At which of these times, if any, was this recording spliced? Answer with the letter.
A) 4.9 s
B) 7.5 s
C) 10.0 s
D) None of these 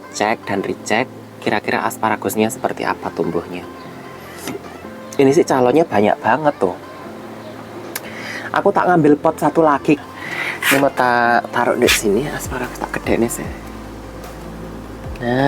C